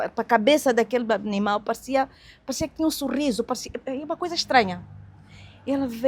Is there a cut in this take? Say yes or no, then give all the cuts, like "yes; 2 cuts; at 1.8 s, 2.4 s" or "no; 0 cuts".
no; 0 cuts